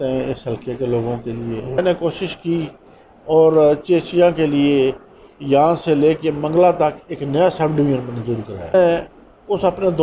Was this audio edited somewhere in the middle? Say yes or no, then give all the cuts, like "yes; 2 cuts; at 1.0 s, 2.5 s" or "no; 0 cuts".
yes; 2 cuts; at 1.8 s, 8.7 s